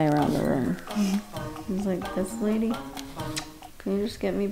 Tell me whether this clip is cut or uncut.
uncut